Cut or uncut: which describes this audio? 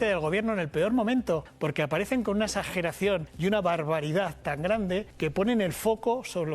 cut